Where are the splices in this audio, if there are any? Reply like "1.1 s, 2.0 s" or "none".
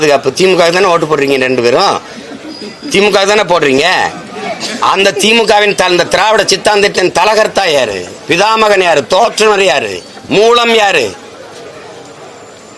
none